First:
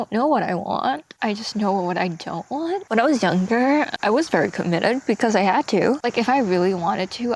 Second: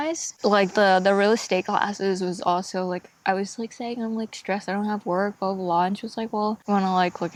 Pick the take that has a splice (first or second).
first